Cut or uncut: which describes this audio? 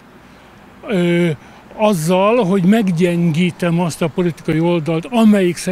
uncut